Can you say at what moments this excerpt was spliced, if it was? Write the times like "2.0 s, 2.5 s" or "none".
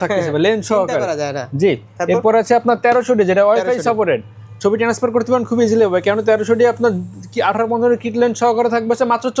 none